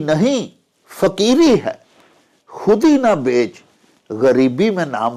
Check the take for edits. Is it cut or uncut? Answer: uncut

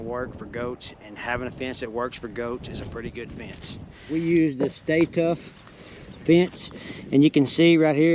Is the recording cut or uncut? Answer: cut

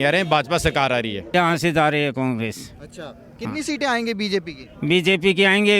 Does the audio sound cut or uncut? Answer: cut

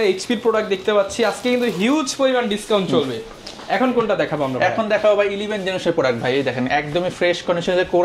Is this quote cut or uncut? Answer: uncut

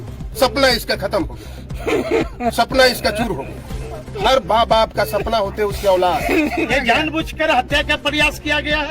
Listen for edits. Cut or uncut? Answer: cut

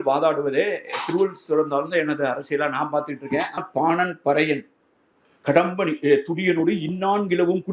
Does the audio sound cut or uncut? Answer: cut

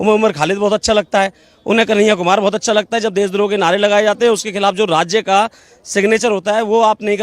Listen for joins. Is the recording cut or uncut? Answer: uncut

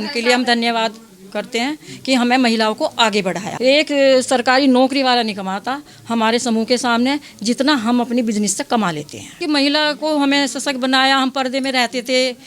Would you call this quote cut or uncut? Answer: cut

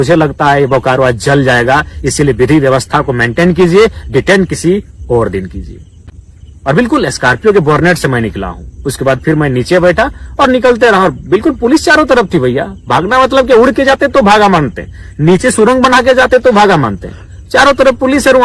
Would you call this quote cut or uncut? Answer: uncut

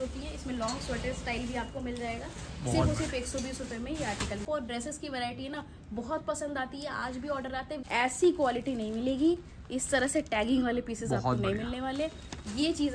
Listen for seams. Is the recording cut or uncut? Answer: cut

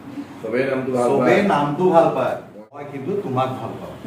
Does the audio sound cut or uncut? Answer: cut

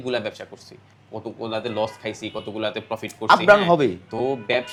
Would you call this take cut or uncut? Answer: uncut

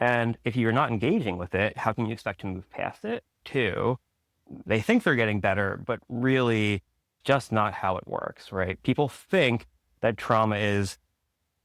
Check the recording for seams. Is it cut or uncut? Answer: cut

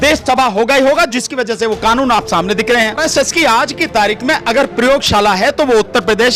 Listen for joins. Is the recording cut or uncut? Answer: cut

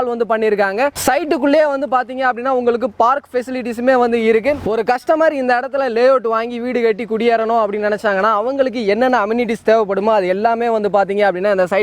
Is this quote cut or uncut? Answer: uncut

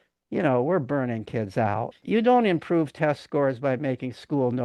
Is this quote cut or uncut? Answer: cut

